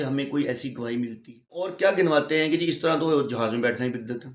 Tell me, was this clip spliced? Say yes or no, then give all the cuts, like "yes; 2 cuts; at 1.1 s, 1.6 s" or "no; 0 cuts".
yes; 1 cut; at 1.7 s